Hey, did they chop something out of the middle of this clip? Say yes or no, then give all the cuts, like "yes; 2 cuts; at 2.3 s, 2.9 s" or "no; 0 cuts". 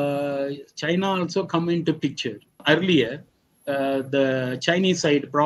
yes; 1 cut; at 2.6 s